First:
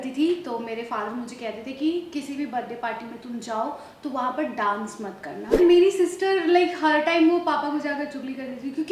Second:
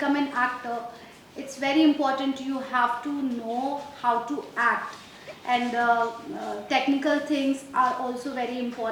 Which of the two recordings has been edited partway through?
first; 1 cut; at 5.6 s

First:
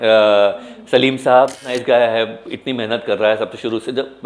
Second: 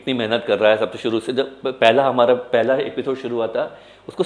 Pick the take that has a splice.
first; 1 cut; at 1.7 s

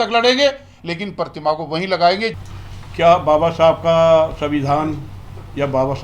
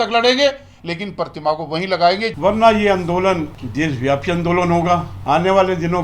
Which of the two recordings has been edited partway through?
second; 3 cuts; at 2.3 s, 3.6 s, 5.1 s

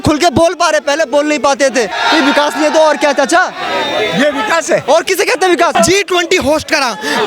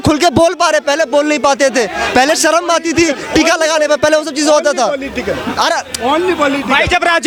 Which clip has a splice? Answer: first; 2 cuts; at 1.9 s, 5.7 s

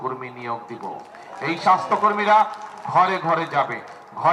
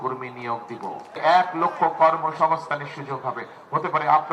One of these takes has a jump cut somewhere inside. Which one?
second; 1 cut; at 1.1 s

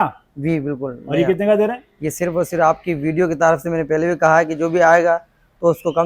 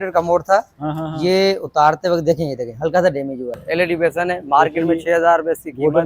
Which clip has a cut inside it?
second; 1 cut; at 3.6 s

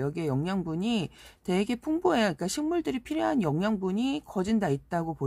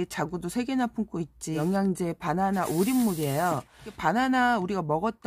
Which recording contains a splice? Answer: second; 2 cuts; at 1.6 s, 3.9 s

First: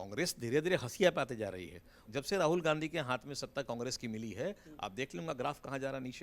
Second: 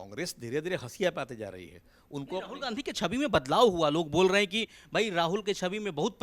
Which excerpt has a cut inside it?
first; 1 cut; at 2.0 s

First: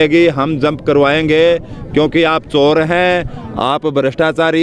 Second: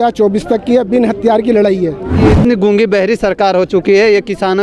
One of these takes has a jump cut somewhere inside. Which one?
second; 1 cut; at 2.2 s

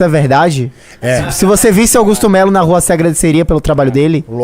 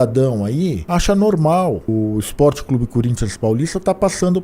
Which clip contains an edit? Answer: second; 2 cuts; at 0.8 s, 1.9 s

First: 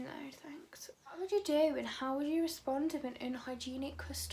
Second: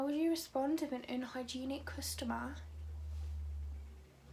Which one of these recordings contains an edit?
first; 1 cut; at 1.1 s

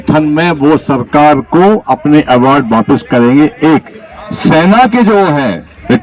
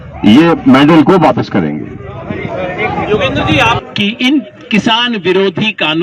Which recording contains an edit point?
second; 1 cut; at 3.8 s

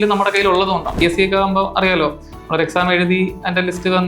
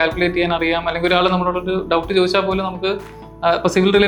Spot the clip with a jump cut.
first; 1 cut; at 1.0 s

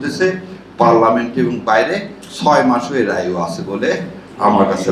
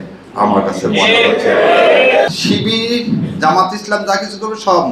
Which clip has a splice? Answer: second; 1 cut; at 2.3 s

